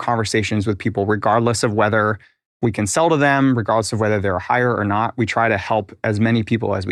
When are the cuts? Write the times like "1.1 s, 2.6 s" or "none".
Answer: none